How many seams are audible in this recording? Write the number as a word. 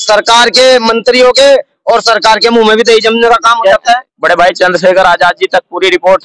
one